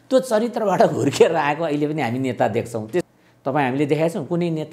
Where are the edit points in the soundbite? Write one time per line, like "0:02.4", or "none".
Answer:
0:03.0

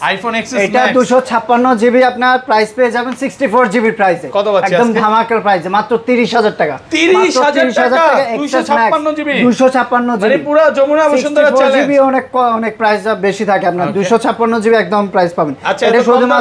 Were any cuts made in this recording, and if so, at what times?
none

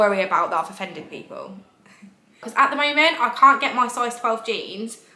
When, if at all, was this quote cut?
0:02.5

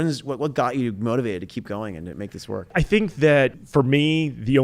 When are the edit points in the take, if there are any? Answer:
0:02.7
0:03.6

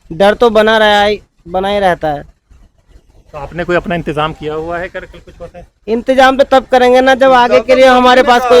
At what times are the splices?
none

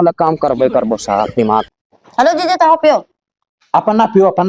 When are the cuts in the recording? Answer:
0:01.7

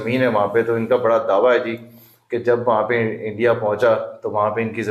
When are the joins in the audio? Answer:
none

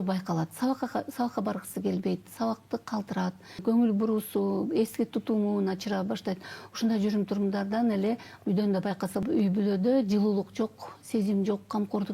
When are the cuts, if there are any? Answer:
0:03.6
0:09.2

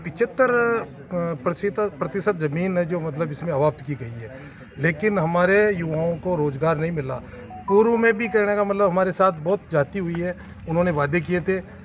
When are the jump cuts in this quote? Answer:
none

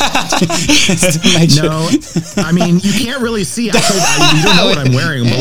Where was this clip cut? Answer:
none

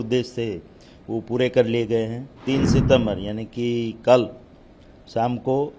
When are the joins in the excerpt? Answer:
0:02.3

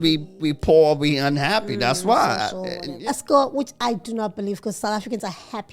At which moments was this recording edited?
0:02.8

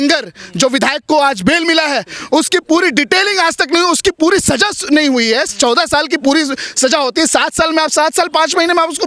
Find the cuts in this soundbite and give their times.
none

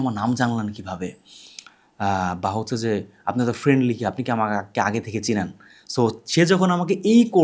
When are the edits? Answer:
none

